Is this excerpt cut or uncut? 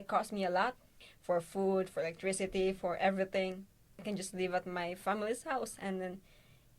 cut